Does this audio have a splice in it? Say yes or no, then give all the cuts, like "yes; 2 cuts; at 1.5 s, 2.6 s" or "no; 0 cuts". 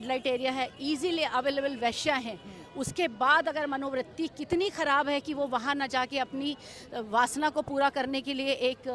no; 0 cuts